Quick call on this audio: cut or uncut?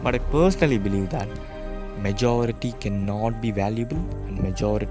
uncut